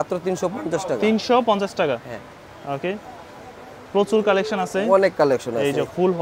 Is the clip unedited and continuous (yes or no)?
yes